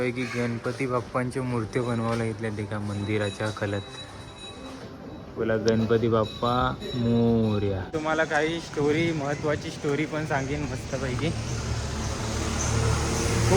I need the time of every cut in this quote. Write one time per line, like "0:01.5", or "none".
0:07.9